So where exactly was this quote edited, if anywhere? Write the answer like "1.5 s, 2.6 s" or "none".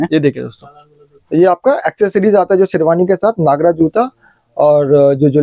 none